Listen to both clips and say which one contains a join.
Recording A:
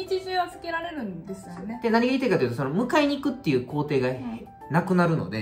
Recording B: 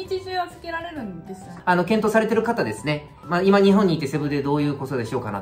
B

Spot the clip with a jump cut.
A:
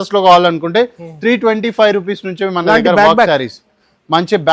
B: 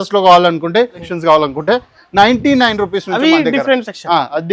B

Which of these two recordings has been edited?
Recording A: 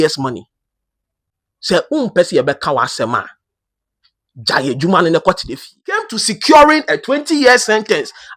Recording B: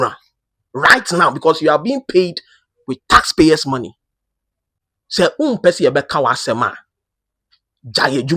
A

